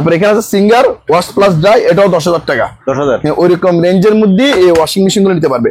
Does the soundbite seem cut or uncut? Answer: uncut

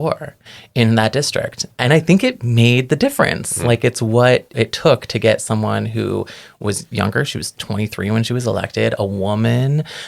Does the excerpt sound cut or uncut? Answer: cut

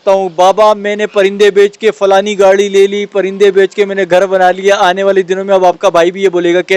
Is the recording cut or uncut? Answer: uncut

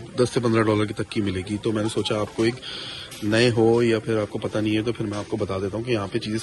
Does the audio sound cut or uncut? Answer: uncut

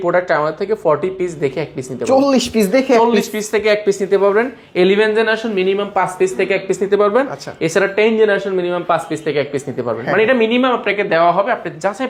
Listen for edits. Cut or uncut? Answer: uncut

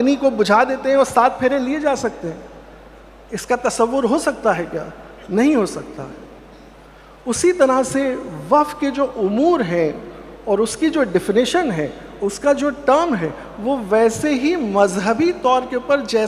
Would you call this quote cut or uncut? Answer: uncut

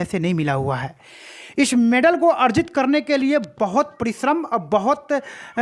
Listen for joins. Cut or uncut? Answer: uncut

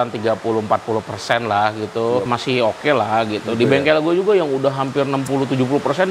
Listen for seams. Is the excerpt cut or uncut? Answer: cut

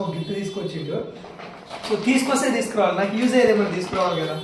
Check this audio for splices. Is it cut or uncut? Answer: uncut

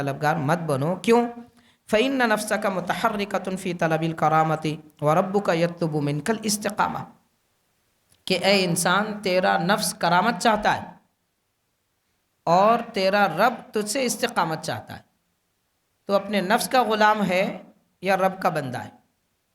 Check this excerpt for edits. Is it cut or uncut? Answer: uncut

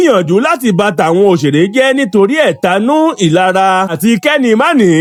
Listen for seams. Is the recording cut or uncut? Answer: uncut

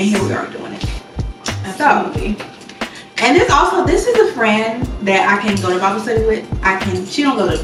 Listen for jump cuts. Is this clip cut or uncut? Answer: uncut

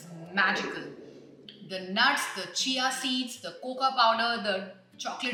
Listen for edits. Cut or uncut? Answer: uncut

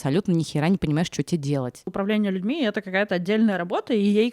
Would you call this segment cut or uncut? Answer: cut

